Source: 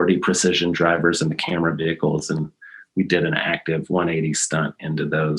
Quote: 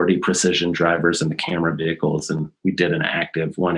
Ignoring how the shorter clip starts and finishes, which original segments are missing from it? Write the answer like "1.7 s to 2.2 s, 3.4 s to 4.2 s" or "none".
2.5 s to 2.8 s